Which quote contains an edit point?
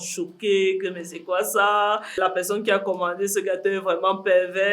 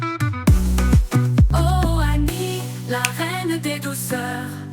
first; 1 cut; at 2.2 s

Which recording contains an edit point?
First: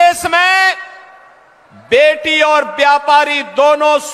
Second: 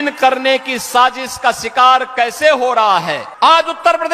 second; 1 cut; at 3.2 s

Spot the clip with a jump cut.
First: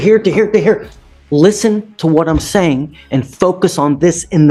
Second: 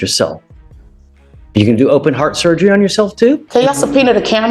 second; 1 cut; at 3.4 s

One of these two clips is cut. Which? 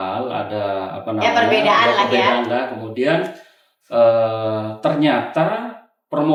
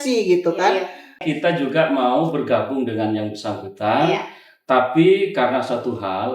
second; 1 cut; at 1.2 s

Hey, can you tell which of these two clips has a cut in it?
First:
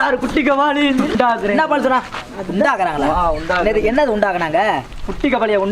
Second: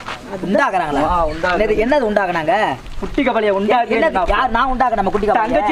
first; 1 cut; at 1.1 s

